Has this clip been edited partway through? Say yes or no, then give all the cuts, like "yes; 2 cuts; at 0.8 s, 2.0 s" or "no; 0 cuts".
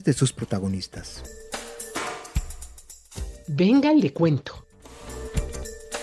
yes; 2 cuts; at 3.3 s, 5.0 s